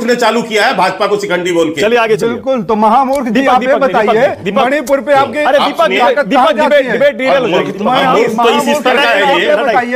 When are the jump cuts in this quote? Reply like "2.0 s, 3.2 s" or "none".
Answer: none